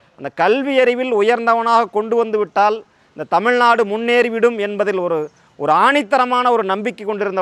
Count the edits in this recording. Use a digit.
0